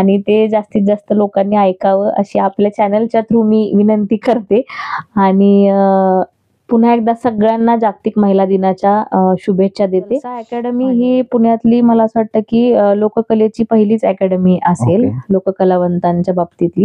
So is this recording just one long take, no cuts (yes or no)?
no